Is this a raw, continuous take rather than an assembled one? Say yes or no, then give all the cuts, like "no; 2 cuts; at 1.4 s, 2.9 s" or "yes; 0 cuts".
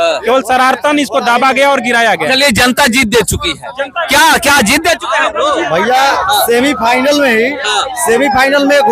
yes; 0 cuts